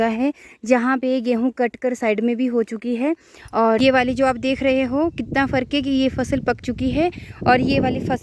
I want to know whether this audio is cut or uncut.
cut